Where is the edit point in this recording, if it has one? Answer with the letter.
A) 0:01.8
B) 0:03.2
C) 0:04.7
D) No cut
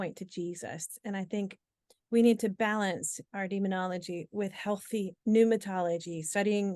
D